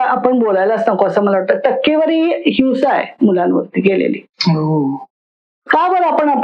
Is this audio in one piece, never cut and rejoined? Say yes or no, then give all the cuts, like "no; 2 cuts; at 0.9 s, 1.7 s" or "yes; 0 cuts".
yes; 0 cuts